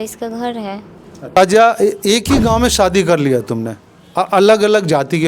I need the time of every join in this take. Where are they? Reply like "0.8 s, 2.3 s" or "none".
1.4 s